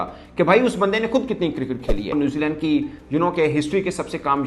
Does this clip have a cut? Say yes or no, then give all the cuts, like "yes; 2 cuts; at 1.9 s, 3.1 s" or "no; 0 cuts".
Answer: yes; 1 cut; at 2.1 s